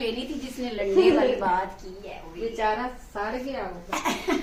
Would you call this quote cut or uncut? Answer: uncut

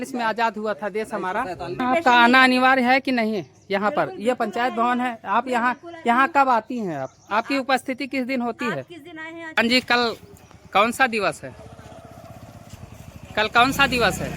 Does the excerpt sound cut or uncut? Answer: cut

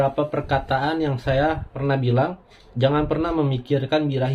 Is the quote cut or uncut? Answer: cut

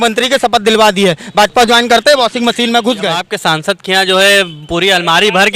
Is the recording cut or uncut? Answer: cut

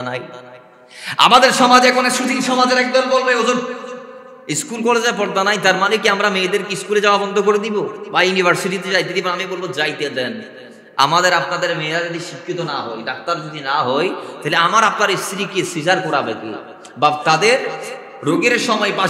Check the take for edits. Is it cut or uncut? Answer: uncut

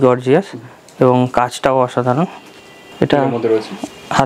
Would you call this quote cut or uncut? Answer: cut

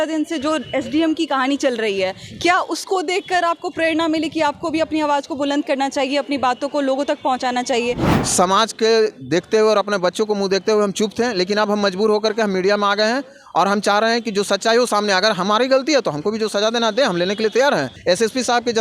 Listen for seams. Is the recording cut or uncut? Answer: cut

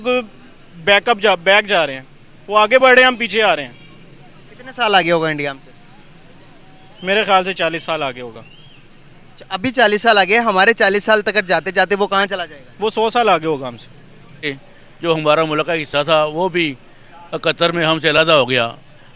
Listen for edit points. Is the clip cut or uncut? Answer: cut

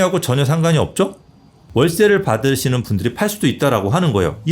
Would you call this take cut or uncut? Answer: cut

